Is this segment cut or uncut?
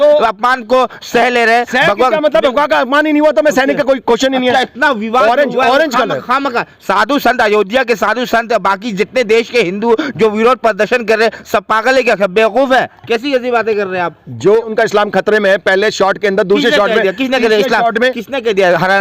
cut